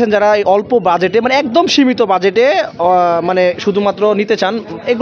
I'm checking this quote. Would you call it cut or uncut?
uncut